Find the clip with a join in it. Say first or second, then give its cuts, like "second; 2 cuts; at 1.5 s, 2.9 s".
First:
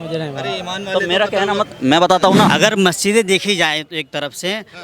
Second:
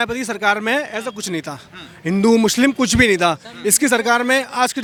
first; 1 cut; at 2.5 s